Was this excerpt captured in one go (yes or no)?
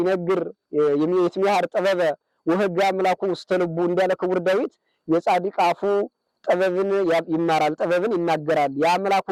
yes